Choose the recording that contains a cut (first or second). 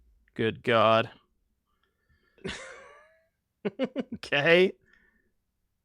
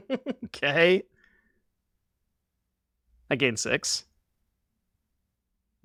first